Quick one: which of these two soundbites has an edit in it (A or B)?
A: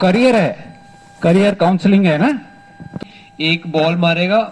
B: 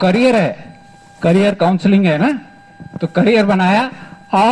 A